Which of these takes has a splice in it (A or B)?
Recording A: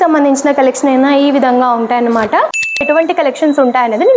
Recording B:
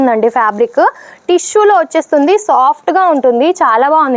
A